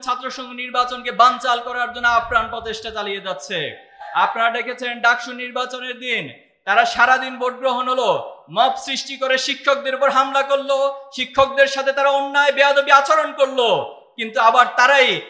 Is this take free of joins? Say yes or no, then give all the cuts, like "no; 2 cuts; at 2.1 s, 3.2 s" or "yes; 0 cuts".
no; 1 cut; at 3.9 s